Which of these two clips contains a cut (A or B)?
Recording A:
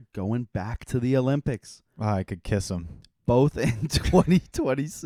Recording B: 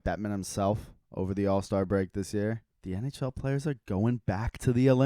B